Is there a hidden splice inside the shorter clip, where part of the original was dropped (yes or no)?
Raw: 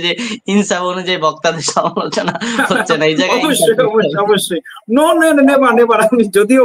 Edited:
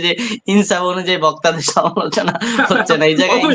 no